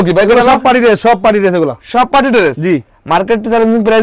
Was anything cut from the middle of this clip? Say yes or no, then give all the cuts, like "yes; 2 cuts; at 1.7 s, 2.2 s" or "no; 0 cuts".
no; 0 cuts